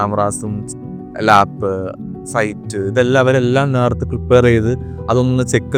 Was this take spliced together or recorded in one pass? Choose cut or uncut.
uncut